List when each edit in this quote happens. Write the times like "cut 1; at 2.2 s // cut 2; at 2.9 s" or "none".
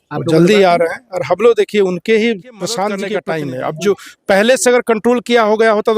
cut 1; at 3.1 s